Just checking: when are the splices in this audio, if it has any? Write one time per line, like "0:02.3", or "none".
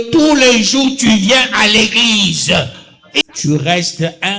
0:03.0